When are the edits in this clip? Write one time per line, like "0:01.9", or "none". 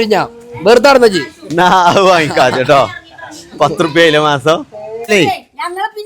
0:05.1